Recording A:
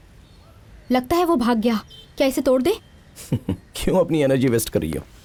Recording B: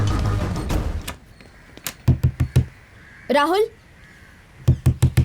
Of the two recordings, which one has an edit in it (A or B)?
B